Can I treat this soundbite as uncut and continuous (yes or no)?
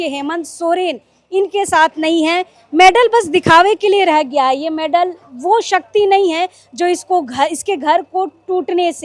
yes